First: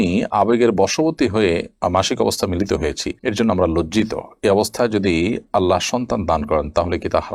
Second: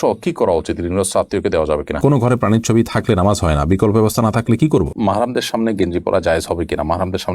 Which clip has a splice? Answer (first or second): second